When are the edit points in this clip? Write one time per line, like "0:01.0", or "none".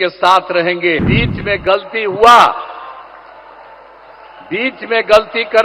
0:01.1

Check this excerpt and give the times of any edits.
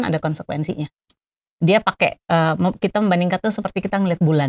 0:01.0

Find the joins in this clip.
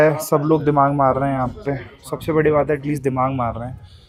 none

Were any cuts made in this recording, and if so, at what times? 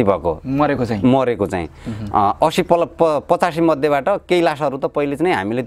none

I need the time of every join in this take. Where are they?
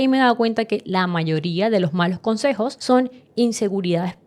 0:02.8

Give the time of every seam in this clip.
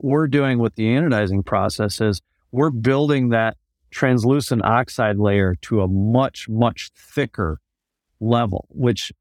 none

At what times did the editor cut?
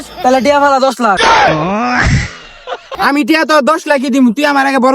0:01.2
0:02.9

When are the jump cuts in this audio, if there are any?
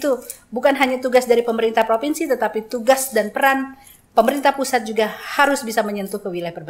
none

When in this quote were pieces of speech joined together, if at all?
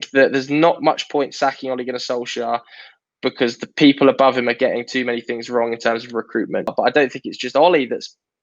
0:06.7

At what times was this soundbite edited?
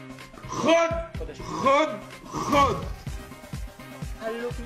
none

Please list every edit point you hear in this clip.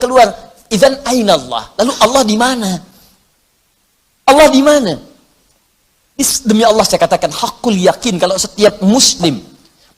none

